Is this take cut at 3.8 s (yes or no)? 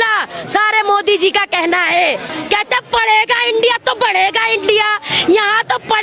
no